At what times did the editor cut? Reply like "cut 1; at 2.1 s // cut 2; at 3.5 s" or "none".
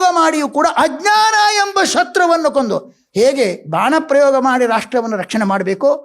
cut 1; at 3.0 s

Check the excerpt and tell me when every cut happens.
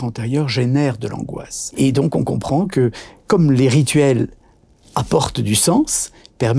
cut 1; at 1.7 s

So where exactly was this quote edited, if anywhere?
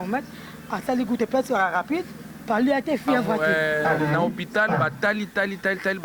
cut 1; at 3.4 s

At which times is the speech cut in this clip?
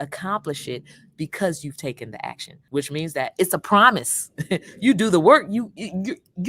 cut 1; at 2.5 s

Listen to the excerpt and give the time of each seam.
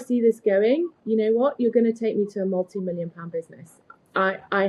none

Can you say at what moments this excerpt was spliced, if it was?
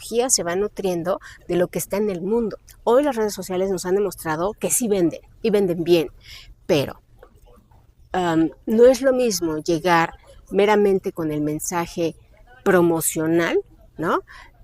cut 1; at 2.7 s

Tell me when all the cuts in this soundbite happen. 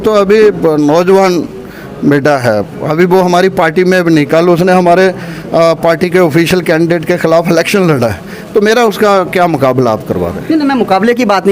none

